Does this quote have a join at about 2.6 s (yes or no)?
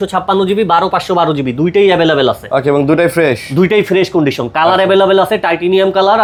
no